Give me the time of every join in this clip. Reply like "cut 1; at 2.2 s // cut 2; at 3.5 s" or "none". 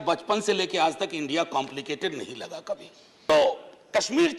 cut 1; at 3.2 s